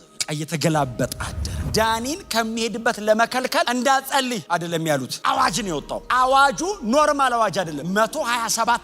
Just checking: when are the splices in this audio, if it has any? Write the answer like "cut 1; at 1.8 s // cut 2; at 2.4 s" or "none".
cut 1; at 1.6 s